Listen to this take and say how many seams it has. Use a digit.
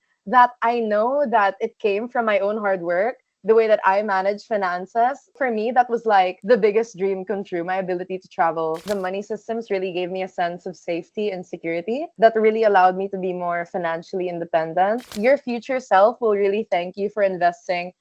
3